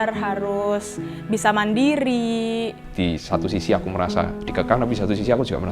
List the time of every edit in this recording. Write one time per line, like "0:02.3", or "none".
0:02.8